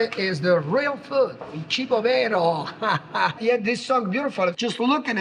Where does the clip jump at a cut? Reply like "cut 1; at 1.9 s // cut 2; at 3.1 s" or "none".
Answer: cut 1; at 3.4 s